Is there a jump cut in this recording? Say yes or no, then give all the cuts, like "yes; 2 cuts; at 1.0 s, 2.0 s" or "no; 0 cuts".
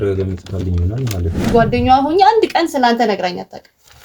yes; 1 cut; at 1.5 s